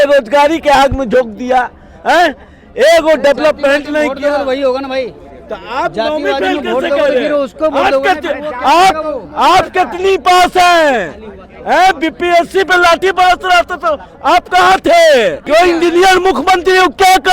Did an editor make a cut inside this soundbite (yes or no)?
yes